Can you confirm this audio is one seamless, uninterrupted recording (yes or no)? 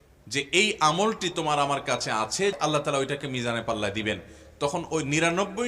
no